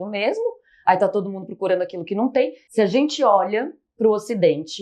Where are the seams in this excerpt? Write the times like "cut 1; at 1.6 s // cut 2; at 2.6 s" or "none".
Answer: cut 1; at 2.6 s